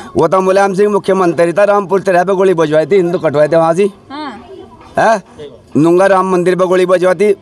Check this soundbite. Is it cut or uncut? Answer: uncut